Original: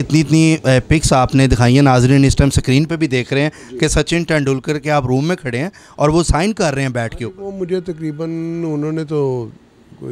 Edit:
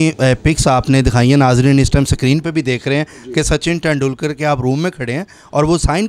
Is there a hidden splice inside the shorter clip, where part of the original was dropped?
no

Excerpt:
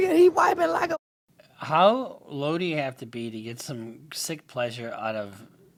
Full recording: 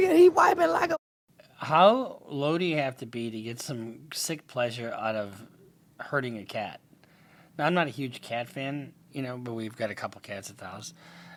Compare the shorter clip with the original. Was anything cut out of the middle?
no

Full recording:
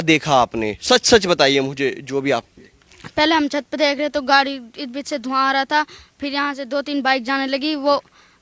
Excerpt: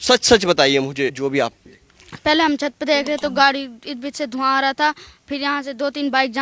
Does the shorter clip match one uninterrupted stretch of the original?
no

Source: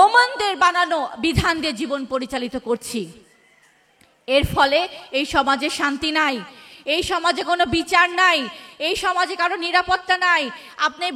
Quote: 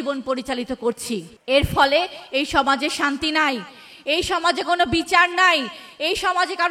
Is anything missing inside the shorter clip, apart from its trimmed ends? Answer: yes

